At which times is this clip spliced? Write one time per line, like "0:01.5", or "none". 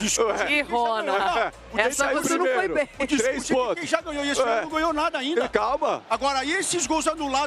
none